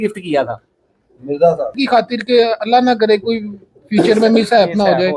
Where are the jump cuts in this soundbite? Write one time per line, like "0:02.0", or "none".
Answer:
0:01.8